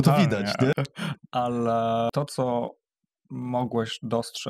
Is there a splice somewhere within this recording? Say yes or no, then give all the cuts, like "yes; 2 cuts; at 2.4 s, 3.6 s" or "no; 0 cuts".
yes; 2 cuts; at 0.7 s, 2.1 s